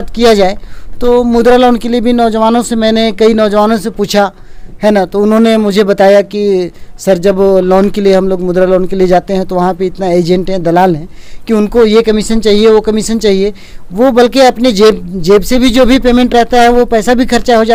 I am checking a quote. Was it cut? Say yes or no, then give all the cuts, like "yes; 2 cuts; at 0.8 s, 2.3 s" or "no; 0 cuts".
no; 0 cuts